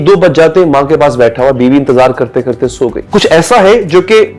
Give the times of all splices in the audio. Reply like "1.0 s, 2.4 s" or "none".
3.0 s